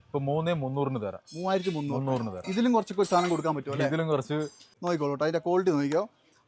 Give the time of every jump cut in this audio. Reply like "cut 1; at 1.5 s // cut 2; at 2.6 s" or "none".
cut 1; at 4.7 s